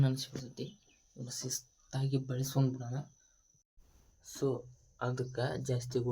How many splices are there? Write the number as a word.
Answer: one